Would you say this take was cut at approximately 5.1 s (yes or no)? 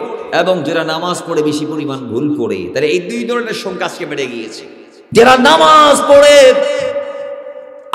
yes